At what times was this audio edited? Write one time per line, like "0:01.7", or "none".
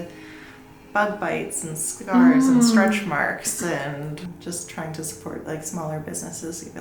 0:04.3